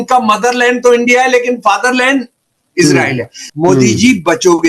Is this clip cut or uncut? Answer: cut